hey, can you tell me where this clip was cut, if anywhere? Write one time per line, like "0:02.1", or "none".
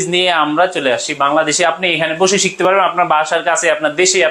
none